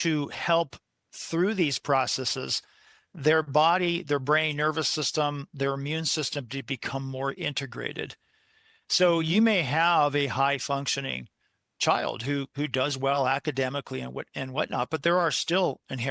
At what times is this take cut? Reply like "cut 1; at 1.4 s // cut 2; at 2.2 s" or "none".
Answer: none